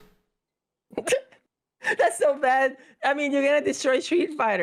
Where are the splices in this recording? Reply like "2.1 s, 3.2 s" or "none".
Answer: none